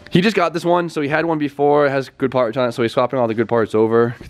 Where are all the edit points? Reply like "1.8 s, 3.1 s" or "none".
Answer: 2.7 s